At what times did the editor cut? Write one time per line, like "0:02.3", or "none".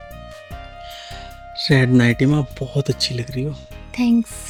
none